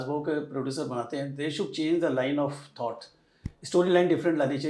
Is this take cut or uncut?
uncut